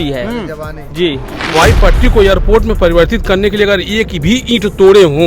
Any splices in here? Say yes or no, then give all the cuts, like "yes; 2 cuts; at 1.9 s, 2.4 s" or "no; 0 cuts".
yes; 1 cut; at 1.5 s